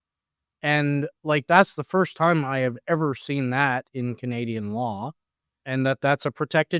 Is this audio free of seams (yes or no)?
no